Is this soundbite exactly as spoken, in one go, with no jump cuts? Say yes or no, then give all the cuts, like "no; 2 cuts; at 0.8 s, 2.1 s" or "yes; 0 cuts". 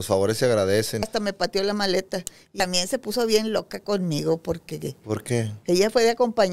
no; 2 cuts; at 1.1 s, 2.5 s